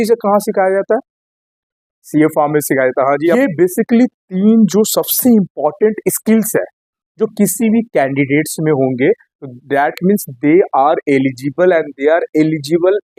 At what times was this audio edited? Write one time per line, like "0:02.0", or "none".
0:03.4